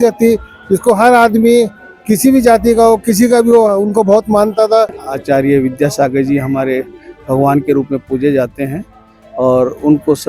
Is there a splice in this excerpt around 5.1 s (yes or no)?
yes